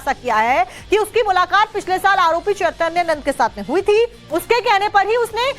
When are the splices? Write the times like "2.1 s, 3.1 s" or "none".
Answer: 2.0 s